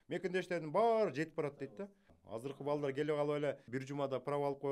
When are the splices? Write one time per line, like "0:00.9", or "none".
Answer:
0:02.1
0:03.7